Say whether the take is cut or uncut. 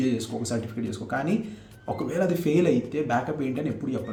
uncut